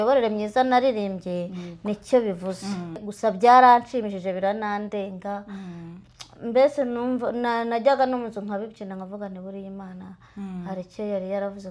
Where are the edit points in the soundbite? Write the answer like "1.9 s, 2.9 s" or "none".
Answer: 3.0 s